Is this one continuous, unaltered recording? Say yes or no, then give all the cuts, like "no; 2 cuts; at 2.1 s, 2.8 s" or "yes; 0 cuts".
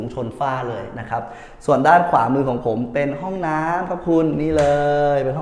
yes; 0 cuts